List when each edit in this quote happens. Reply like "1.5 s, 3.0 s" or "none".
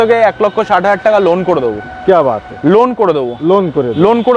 none